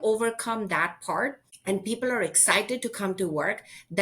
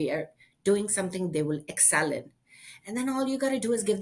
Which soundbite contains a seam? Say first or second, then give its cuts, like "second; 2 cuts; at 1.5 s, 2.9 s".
first; 1 cut; at 1.5 s